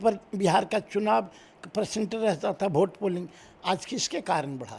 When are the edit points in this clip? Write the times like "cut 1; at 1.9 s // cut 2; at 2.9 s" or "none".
none